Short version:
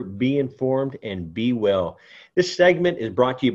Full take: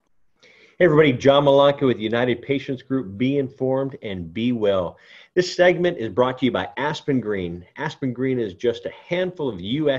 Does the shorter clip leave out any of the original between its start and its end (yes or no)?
no